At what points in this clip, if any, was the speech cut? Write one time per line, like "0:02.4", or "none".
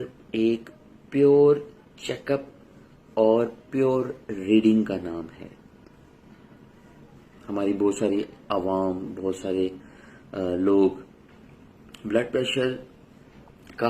none

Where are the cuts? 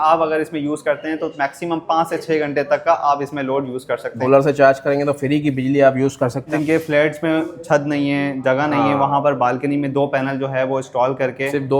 0:04.1
0:06.5

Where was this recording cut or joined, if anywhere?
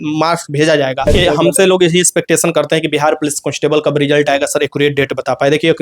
0:01.1

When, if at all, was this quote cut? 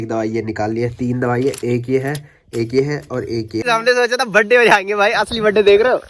0:03.6

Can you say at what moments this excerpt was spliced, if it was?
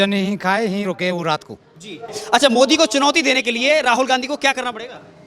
0:02.2

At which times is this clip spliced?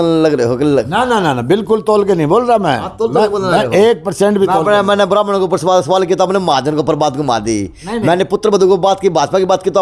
none

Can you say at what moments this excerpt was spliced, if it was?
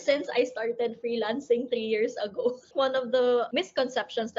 0:02.7

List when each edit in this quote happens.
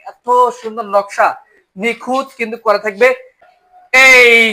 none

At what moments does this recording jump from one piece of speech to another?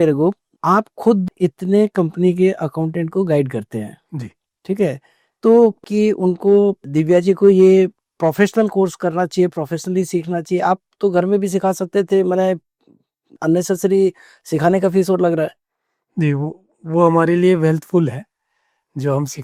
none

